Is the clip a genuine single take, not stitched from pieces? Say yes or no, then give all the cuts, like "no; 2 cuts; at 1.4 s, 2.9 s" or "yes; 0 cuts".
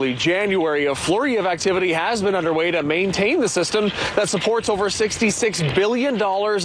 yes; 0 cuts